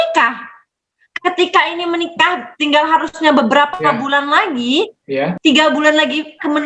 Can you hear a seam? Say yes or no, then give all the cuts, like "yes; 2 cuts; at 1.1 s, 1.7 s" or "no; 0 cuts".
yes; 1 cut; at 5.3 s